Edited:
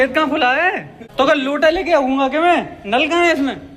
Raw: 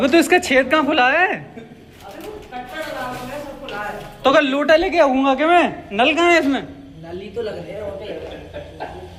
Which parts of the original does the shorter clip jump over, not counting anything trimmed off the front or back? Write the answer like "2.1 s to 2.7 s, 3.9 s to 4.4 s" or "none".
1.5 s to 4.0 s

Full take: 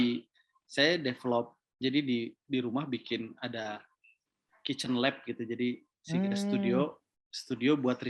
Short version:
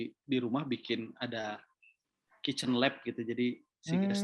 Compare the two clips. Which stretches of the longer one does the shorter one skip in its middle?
none

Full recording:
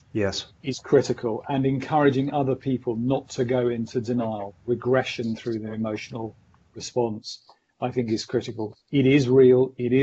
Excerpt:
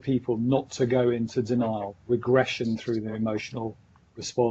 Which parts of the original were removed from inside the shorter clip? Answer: none

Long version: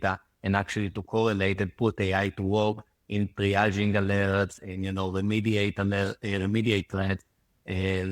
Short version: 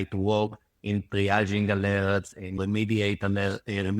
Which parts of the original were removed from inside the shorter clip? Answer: 4.8 s to 5.1 s

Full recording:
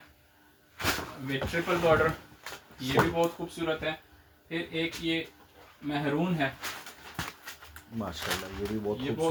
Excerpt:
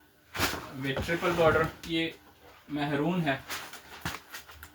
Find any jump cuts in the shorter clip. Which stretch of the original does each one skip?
2.3 s to 4.9 s

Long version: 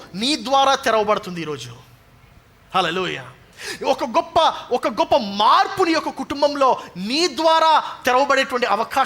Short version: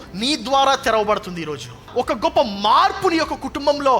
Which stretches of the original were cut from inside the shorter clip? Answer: 1.9 s to 4.6 s

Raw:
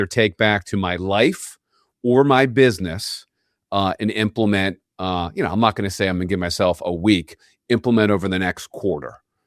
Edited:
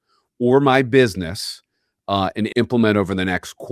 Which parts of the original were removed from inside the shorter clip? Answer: 4.1 s to 7.6 s

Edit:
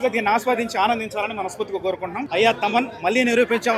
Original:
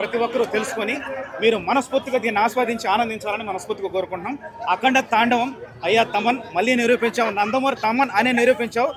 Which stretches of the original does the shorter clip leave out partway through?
4.3 s to 5.7 s

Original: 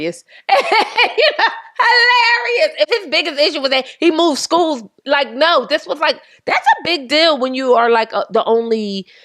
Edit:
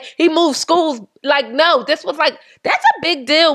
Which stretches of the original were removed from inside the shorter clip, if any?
none

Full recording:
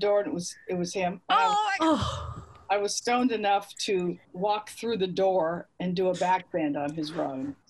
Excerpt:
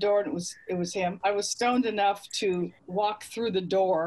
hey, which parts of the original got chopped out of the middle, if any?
1.2 s to 2.6 s

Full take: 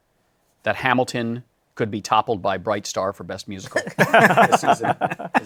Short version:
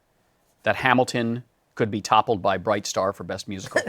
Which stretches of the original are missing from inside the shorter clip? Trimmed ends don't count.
none

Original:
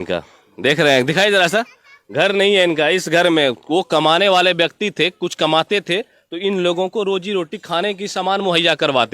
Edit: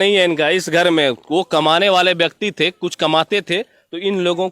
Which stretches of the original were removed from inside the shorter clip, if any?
none

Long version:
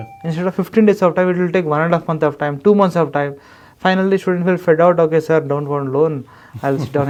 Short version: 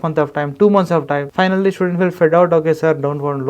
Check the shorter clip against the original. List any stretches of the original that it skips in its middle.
3.3 s to 3.7 s

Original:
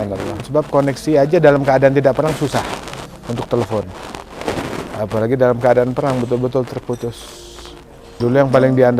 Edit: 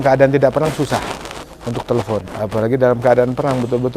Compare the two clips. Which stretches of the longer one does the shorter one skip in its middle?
3.9 s to 4.9 s

